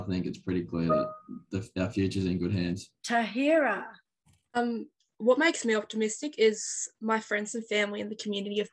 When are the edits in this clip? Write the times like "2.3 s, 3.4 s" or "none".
2.9 s